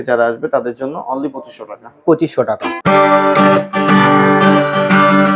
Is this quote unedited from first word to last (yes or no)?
no